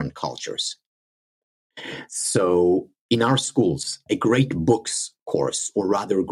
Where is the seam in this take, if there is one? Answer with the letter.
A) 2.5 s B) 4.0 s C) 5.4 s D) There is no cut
B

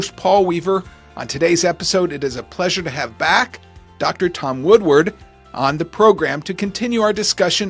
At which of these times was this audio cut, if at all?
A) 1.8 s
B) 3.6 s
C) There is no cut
C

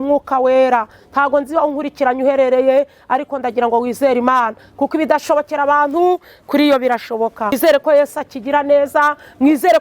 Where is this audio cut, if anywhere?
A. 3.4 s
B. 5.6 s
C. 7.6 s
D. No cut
C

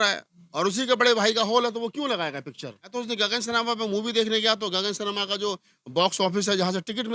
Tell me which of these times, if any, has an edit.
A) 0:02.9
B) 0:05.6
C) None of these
A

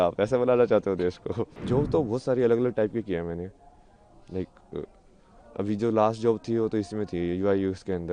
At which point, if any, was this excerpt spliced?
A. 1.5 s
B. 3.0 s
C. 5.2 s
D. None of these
A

